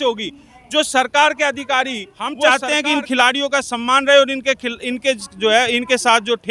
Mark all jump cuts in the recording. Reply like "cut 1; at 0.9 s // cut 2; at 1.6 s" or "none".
cut 1; at 2.5 s